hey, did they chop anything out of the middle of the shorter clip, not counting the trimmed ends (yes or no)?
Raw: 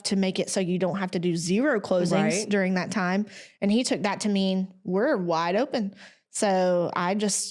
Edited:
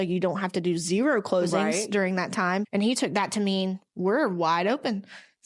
yes